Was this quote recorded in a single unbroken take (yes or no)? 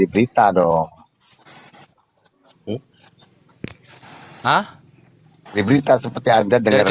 yes